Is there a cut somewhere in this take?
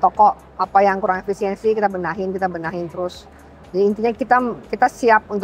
no; 0 cuts

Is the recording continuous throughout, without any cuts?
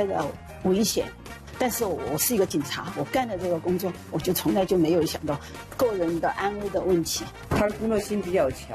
no; 2 cuts; at 1.4 s, 7.4 s

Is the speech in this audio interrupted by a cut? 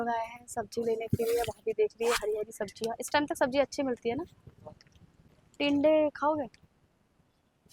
no; 0 cuts

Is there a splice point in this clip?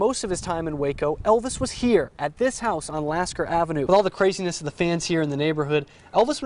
yes; 1 cut; at 3.9 s

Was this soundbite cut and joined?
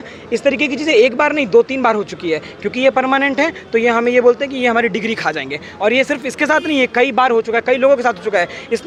no; 0 cuts

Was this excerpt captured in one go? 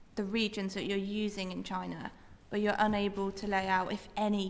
yes; 0 cuts

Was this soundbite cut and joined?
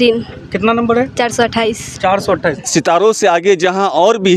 yes; 1 cut; at 2.5 s

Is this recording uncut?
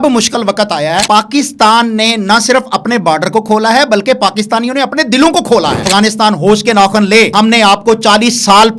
no; 3 cuts; at 1.0 s, 5.9 s, 7.3 s

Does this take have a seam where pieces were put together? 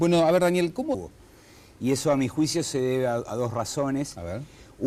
no; 0 cuts

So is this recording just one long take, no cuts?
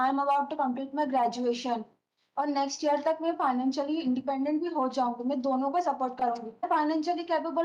no; 1 cut; at 6.7 s

